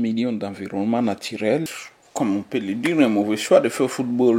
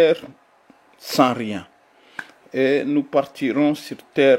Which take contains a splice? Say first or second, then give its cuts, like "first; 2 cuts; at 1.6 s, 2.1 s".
first; 1 cut; at 1.8 s